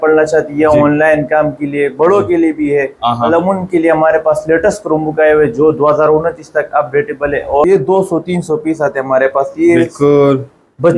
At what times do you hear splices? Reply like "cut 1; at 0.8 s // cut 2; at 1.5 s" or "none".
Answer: cut 1; at 7.6 s